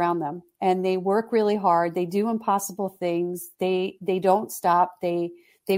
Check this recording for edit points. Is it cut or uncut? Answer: uncut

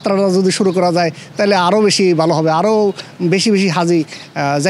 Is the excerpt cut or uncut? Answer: uncut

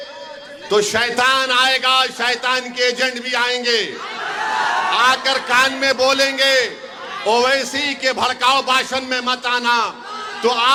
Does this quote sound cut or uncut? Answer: uncut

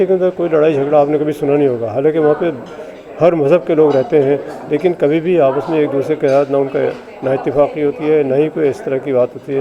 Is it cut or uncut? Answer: uncut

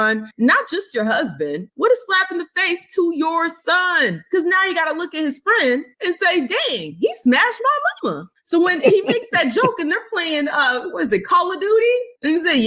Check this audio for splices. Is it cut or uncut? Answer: uncut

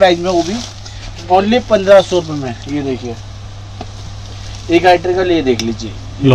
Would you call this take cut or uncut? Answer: uncut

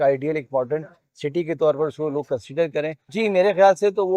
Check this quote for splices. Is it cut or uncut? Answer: cut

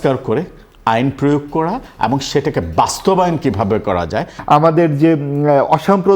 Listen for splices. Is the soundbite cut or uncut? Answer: cut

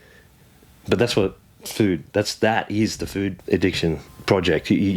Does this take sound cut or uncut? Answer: cut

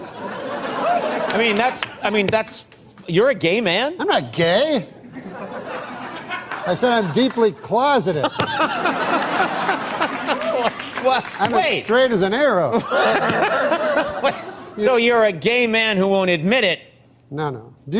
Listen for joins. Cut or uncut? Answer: cut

